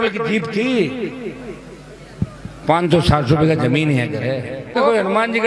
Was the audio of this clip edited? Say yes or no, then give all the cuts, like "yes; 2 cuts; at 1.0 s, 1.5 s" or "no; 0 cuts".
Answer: no; 0 cuts